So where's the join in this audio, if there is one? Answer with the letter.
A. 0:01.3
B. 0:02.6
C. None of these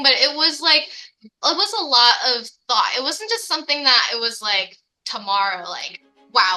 C